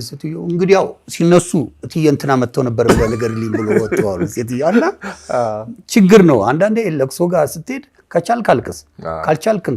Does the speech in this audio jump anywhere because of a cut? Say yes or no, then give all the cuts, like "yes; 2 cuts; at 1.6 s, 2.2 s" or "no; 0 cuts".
no; 0 cuts